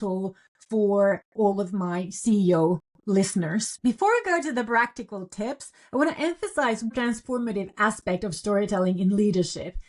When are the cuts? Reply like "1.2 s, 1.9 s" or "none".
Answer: 3.7 s, 6.9 s